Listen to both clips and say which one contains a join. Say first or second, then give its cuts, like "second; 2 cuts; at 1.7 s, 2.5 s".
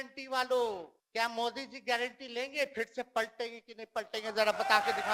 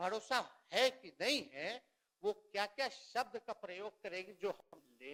first; 1 cut; at 1.0 s